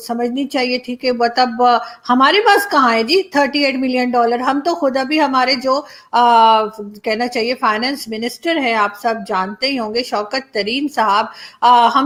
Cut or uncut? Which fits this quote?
uncut